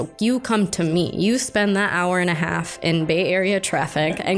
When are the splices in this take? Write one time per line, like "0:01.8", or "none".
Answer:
none